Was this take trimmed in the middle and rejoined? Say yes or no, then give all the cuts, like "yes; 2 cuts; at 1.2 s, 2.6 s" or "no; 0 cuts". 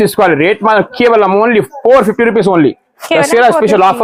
no; 0 cuts